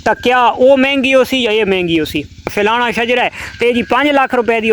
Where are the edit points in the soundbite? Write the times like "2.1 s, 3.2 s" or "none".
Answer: 2.5 s